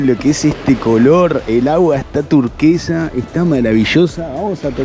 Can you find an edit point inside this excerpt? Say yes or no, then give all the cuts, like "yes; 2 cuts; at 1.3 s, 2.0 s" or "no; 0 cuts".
no; 0 cuts